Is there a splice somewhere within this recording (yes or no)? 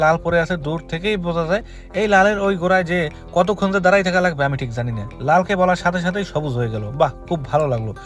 no